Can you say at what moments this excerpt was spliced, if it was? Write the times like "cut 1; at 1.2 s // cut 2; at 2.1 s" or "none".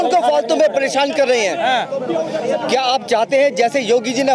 none